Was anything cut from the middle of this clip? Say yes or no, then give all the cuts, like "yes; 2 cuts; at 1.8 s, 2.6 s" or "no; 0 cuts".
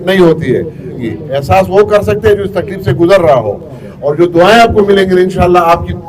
yes; 1 cut; at 1.0 s